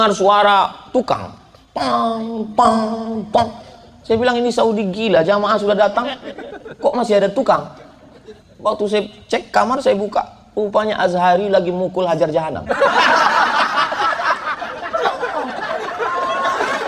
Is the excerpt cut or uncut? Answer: uncut